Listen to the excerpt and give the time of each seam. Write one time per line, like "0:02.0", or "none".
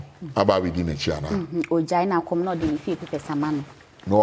none